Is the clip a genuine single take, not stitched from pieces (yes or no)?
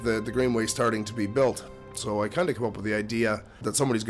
yes